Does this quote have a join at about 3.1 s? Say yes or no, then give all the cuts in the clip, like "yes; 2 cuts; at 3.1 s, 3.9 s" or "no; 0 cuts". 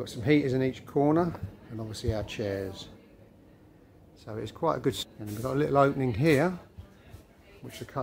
no; 1 cut; at 5.0 s